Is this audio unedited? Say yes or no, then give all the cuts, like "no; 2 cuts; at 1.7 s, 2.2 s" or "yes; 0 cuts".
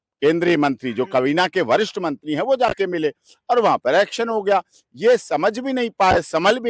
yes; 0 cuts